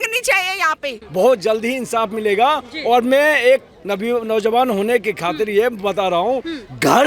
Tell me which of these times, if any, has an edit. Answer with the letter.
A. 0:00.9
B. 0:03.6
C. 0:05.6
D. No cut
A